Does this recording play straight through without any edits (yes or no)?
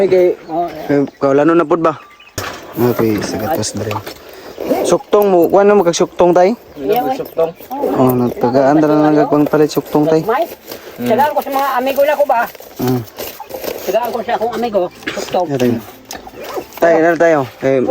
no